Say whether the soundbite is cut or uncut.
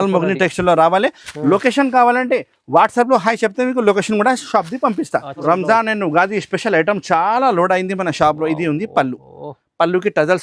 cut